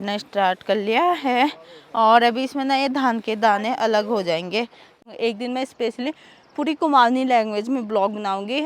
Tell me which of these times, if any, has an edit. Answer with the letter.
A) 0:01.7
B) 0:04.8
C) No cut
B